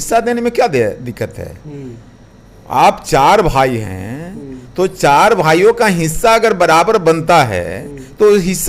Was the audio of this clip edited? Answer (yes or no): no